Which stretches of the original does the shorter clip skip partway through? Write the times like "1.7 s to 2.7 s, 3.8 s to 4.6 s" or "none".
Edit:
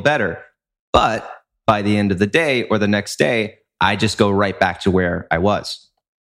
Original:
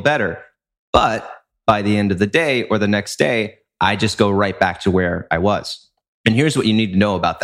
none